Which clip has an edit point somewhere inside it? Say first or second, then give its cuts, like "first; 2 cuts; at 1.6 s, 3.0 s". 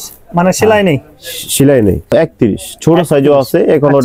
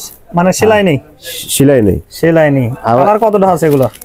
first; 1 cut; at 2.1 s